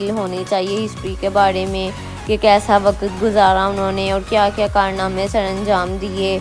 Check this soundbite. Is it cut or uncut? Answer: uncut